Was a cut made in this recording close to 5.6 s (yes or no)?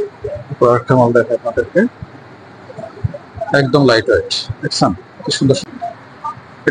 yes